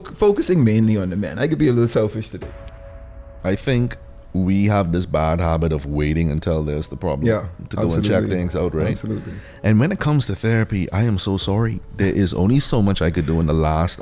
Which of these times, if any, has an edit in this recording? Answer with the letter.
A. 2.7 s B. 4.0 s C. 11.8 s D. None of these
A